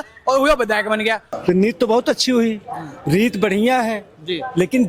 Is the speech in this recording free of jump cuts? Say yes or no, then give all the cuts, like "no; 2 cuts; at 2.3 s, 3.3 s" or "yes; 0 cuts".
no; 1 cut; at 1.3 s